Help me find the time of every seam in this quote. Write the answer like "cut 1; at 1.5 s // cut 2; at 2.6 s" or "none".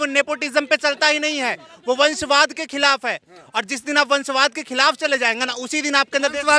none